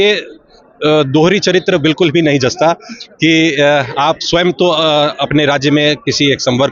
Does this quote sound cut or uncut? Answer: uncut